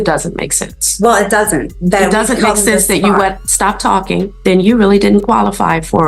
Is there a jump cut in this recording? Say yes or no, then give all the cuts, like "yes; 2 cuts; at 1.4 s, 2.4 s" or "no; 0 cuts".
yes; 1 cut; at 4.3 s